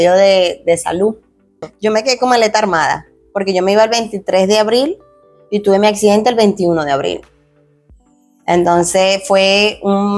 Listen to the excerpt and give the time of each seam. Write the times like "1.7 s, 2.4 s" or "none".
1.7 s

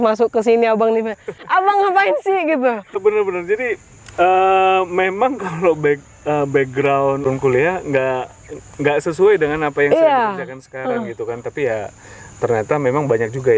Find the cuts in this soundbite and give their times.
1.5 s, 3.0 s, 7.2 s

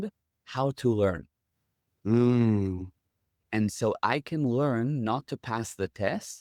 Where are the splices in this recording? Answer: none

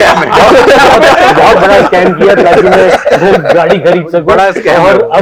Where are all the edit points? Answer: none

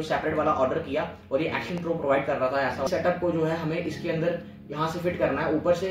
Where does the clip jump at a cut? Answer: 2.9 s

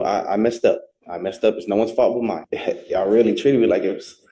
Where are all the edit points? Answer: 2.5 s

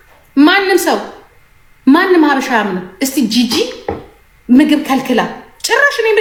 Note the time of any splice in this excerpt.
none

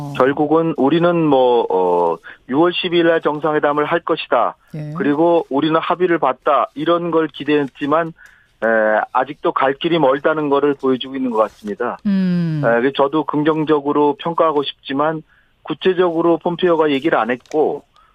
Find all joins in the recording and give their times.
none

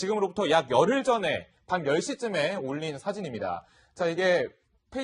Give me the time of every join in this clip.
1.4 s

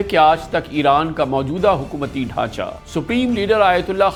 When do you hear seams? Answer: none

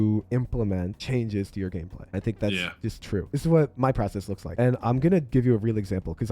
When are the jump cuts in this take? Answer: 3.2 s, 4.5 s

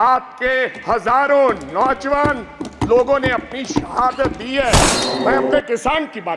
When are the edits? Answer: 4.9 s

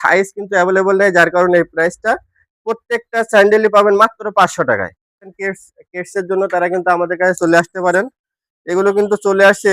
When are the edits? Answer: 5.3 s, 7.7 s

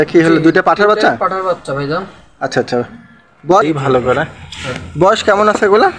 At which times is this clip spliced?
3.6 s

